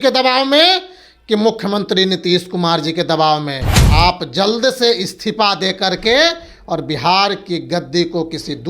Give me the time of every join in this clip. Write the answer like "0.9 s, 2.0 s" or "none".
3.8 s